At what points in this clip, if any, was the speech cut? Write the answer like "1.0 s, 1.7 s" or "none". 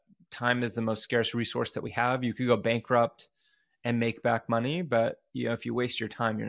none

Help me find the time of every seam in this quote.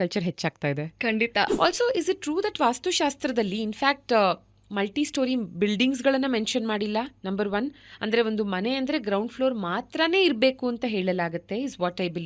1.5 s

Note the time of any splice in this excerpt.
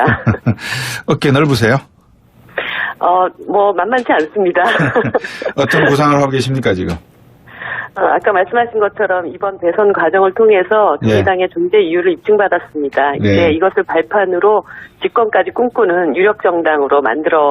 12.4 s

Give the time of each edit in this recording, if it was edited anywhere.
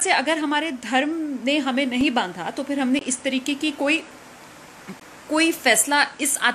none

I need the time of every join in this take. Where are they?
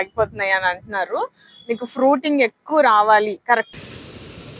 3.7 s

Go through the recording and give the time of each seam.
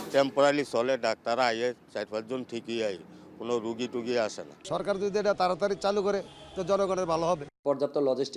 4.6 s, 7.5 s

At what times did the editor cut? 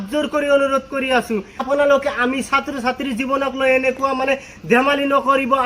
1.6 s

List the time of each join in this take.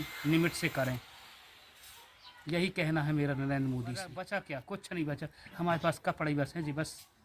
4.1 s

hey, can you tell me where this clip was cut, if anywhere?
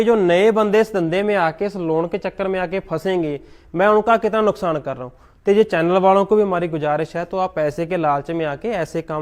none

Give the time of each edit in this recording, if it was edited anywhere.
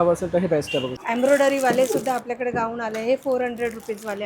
1.0 s

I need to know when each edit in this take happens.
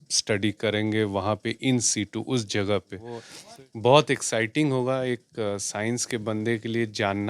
3.3 s

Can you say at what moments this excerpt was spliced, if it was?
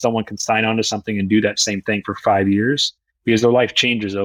none

